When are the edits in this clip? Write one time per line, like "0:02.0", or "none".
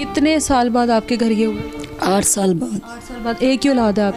none